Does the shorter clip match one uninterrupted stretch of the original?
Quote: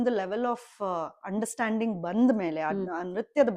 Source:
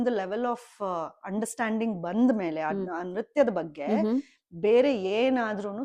yes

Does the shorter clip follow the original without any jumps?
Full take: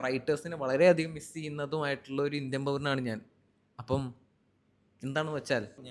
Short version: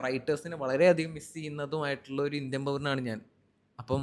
yes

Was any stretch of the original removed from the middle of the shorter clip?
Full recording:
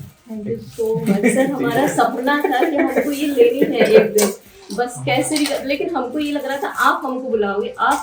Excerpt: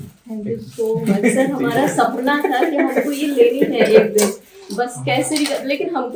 no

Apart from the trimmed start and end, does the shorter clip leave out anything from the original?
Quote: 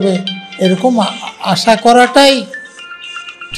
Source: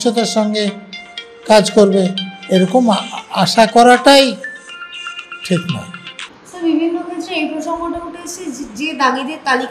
no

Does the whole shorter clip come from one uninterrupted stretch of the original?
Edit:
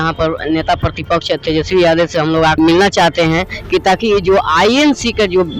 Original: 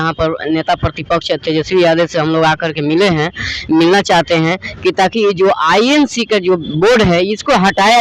no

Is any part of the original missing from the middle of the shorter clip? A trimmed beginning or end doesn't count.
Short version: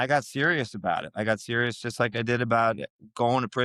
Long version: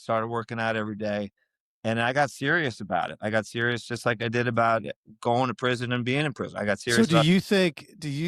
no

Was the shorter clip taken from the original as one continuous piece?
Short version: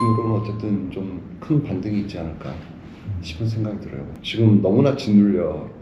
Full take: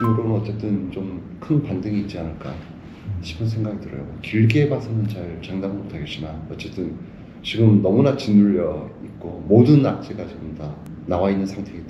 no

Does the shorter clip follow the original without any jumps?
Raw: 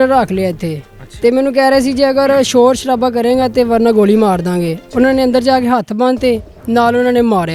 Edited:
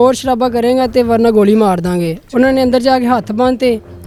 yes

